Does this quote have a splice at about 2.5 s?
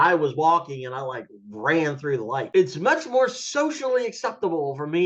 yes; 1 cut; at 2.5 s

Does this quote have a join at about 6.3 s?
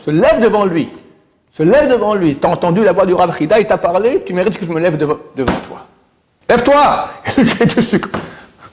yes; 1 cut; at 6.3 s

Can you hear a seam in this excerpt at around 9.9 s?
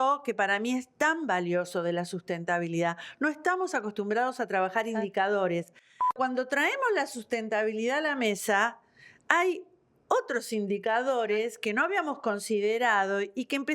no; 1 cut; at 6.1 s

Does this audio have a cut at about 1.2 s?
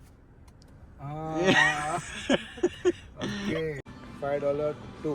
no; 1 cut; at 3.8 s

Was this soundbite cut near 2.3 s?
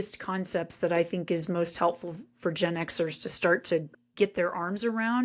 no; 1 cut; at 4.0 s

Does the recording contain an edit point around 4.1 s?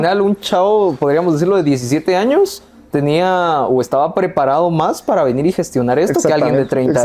no; 0 cuts

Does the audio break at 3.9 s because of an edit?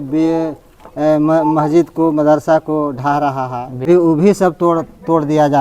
yes; 1 cut; at 3.9 s

